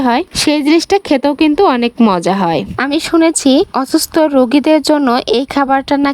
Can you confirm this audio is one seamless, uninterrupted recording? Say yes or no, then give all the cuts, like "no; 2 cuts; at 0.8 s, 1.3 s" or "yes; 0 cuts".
no; 1 cut; at 2.7 s